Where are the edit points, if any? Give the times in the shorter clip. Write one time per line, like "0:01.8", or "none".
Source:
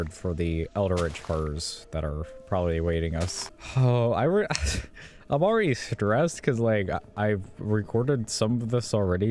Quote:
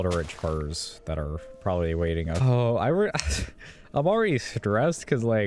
0:02.4